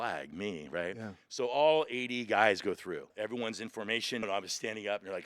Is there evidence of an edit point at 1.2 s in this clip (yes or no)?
no